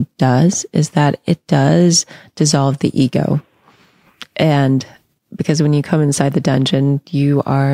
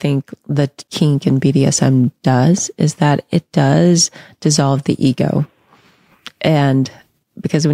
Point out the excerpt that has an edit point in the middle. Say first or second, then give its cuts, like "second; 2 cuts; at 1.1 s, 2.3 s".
second; 1 cut; at 0.9 s